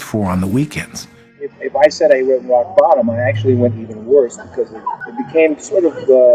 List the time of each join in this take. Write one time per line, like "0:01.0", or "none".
0:01.2